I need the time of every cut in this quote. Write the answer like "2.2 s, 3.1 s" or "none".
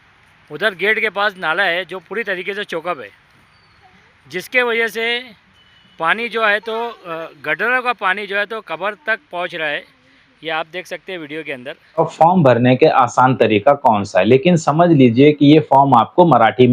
12.0 s